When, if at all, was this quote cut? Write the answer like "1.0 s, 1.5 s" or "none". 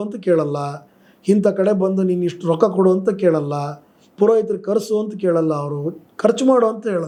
none